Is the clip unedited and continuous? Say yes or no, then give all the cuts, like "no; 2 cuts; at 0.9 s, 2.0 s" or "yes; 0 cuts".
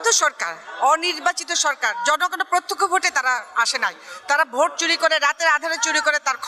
yes; 0 cuts